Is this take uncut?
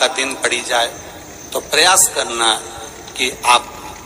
yes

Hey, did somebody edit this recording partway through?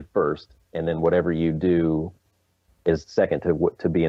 no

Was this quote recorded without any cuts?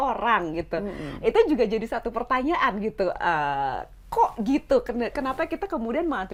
yes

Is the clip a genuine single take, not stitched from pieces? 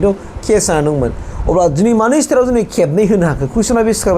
yes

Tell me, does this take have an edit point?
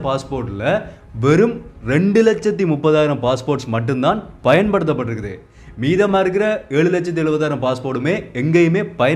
no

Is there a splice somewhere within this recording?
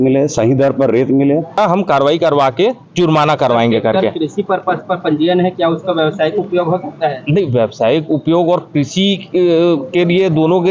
yes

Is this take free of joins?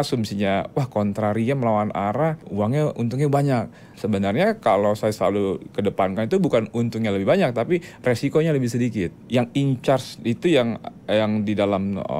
no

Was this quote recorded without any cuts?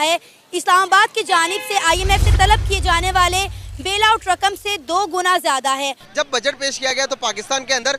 no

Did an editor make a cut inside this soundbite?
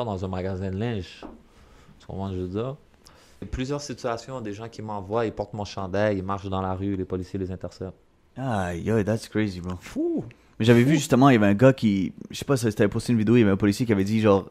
yes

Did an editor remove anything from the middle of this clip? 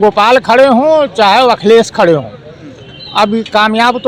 no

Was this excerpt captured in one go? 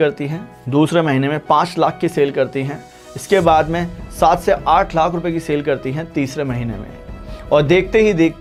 yes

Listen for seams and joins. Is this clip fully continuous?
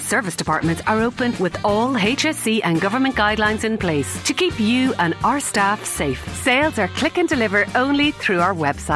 yes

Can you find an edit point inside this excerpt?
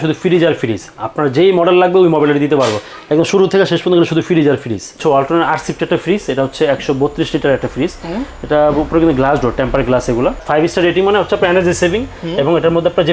yes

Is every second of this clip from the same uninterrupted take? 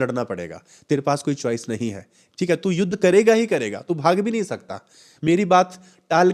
yes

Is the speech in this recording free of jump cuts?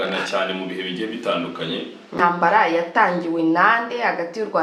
no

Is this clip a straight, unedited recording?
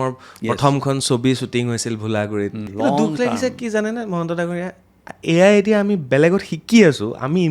no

